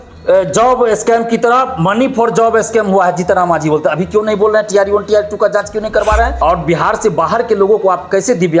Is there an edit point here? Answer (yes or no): yes